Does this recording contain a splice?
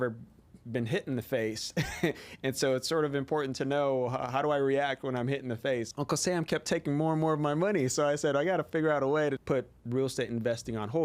yes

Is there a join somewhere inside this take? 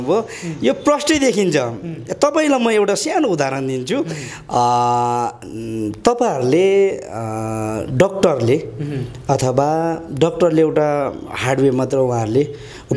no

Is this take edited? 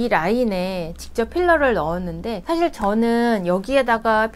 yes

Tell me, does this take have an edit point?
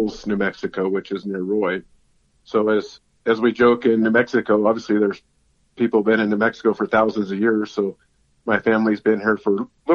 yes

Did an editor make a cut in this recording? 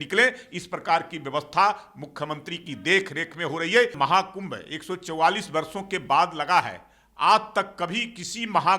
yes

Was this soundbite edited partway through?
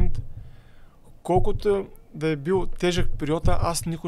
no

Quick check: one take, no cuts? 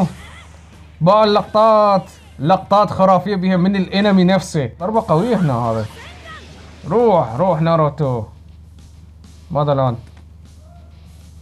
no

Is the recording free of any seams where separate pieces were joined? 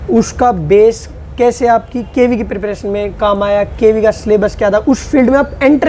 yes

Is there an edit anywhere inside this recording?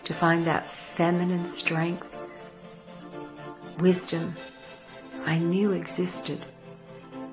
no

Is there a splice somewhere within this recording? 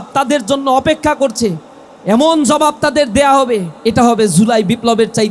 yes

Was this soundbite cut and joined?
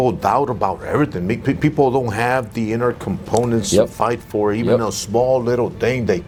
no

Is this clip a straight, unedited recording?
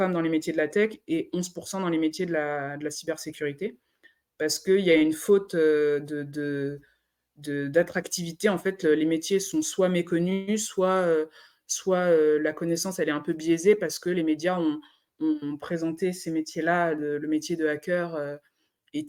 yes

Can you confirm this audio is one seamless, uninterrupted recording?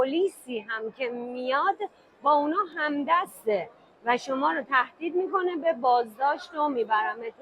yes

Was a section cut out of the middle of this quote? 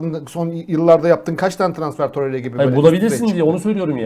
no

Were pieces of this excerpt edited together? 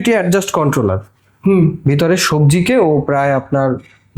no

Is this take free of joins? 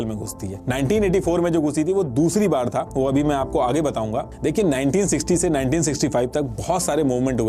yes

